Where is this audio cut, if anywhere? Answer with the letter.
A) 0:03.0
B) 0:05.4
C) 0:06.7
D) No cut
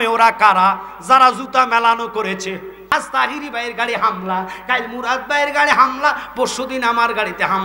A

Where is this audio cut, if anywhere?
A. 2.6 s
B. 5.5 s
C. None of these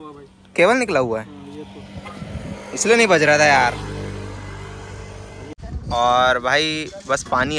B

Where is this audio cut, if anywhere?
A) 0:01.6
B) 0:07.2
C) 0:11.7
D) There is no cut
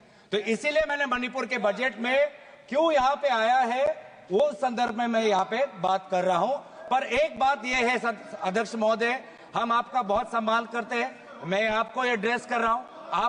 D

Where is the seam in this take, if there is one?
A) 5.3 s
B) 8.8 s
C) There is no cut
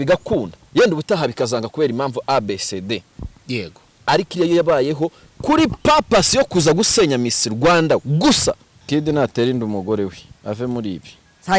B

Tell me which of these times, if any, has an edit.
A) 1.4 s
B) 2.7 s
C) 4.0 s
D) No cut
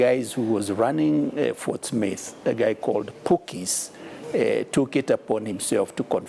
D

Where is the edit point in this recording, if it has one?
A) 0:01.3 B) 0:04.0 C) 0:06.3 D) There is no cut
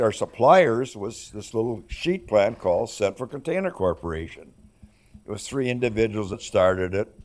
C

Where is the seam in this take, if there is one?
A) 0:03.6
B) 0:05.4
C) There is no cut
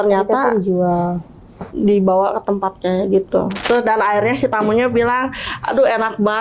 A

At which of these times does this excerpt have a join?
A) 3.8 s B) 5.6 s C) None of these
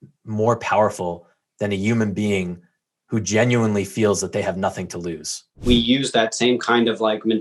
B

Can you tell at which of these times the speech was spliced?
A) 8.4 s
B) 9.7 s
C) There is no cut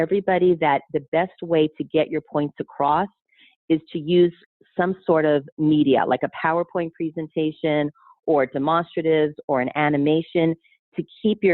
C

